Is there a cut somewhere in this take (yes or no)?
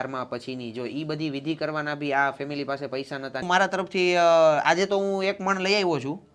yes